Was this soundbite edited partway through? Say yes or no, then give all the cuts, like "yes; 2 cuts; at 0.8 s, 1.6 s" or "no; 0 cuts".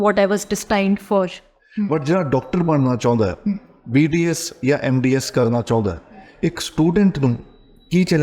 yes; 1 cut; at 1.6 s